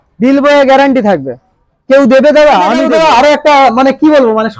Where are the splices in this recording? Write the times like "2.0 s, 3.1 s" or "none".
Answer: 2.8 s